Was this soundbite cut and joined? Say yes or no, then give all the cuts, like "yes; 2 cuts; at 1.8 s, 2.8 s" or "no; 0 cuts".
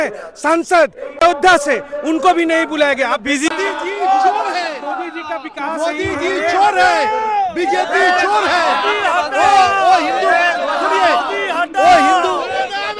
yes; 2 cuts; at 1.2 s, 3.5 s